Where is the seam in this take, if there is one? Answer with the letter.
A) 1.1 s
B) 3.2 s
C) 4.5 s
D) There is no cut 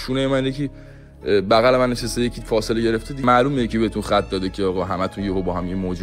B